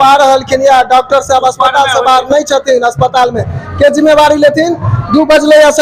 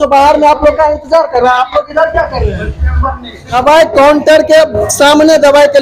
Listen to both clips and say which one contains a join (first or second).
second